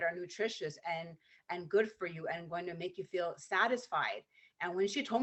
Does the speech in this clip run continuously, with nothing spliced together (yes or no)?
yes